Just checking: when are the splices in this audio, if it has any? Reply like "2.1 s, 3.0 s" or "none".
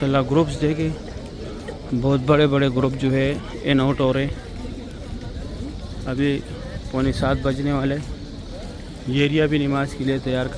none